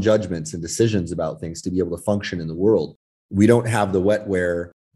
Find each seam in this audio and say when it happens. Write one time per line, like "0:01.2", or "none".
none